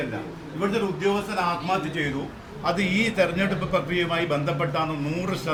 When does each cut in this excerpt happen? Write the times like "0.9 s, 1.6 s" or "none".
none